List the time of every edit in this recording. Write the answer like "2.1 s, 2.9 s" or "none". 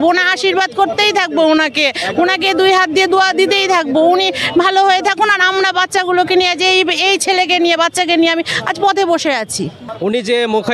9.8 s